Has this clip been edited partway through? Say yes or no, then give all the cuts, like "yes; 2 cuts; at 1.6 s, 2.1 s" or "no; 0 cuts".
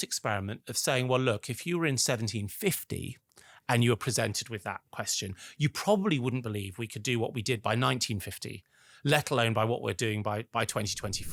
no; 0 cuts